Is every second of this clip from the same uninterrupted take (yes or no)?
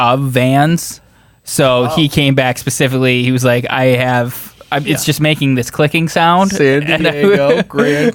yes